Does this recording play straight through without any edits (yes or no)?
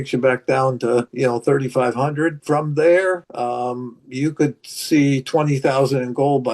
no